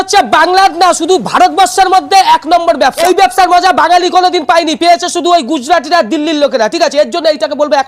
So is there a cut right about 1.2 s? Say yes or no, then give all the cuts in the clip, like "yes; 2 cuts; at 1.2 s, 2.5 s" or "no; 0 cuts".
no; 1 cut; at 3.0 s